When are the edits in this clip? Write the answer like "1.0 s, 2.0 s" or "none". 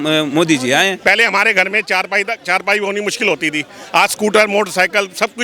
1.0 s